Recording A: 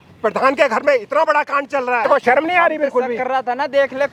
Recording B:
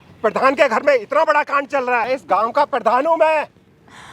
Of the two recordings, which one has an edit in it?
B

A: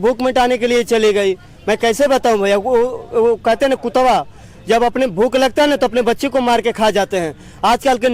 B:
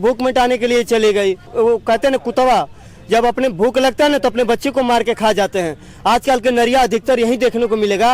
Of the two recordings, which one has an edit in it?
B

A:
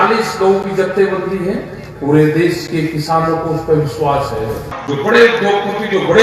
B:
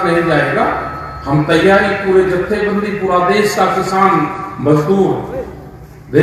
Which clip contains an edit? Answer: A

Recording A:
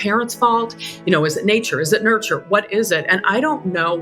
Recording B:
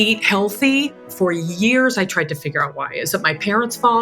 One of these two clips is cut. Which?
B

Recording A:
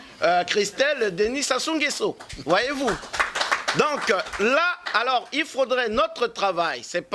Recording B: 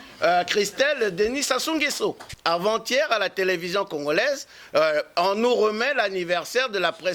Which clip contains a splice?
B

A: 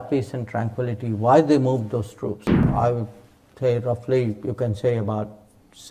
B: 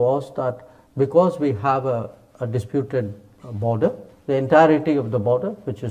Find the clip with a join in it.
A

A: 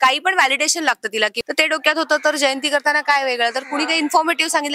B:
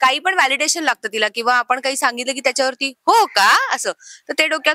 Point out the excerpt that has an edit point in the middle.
A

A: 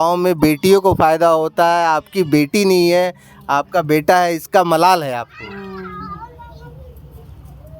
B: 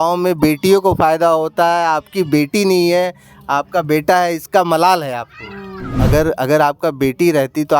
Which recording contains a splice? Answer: B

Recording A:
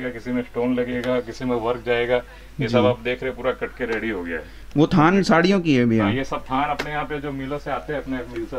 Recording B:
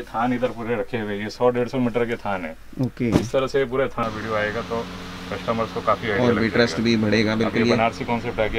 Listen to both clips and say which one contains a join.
B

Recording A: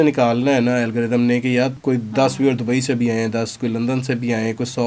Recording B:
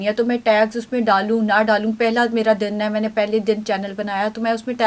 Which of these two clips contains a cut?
A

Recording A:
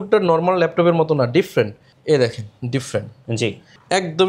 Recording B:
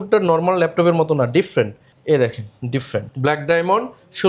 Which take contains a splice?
B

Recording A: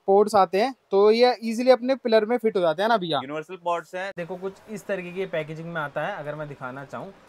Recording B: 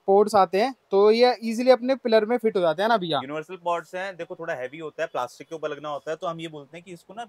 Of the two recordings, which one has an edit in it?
A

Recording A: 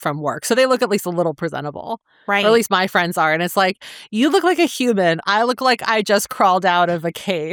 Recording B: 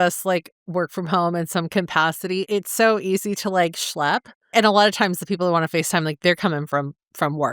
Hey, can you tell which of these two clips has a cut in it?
B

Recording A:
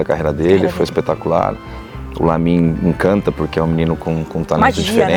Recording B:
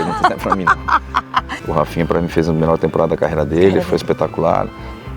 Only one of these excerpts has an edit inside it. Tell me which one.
B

